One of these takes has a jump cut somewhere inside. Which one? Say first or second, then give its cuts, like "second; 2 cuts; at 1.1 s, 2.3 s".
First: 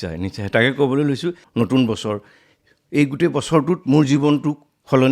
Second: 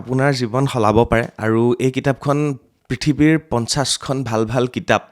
first; 1 cut; at 1.4 s